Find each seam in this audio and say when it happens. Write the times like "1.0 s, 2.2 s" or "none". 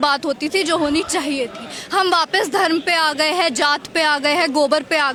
none